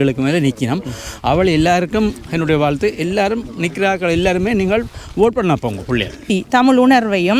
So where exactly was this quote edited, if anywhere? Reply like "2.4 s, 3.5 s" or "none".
6.3 s